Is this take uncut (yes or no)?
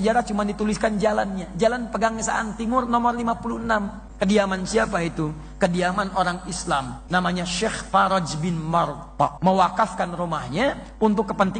no